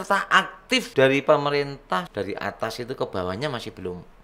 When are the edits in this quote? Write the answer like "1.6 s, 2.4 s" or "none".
0.9 s, 2.1 s